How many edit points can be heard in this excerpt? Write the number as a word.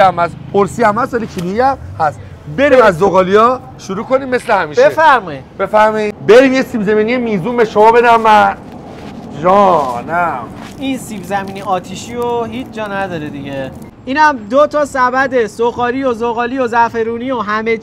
two